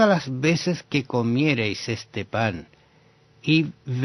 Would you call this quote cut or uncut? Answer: cut